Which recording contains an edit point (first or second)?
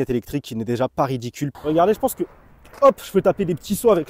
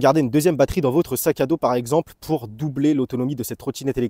first